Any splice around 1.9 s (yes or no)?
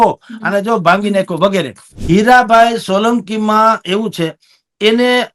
yes